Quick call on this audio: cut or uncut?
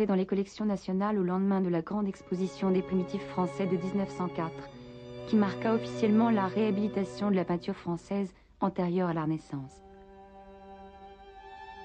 cut